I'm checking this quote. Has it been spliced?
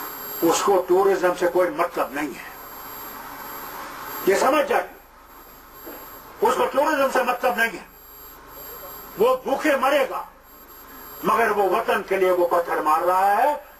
no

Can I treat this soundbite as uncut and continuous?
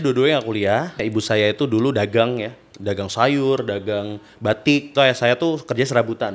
no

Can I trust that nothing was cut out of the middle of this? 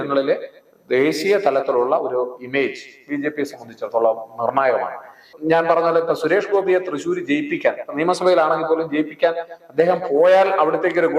no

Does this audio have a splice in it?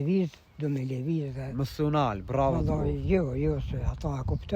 no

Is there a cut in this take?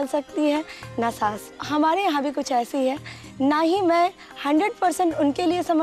no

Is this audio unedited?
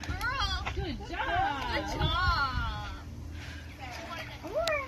no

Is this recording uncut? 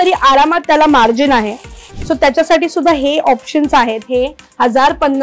no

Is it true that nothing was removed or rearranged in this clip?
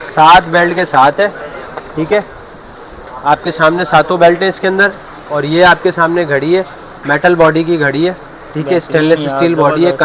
yes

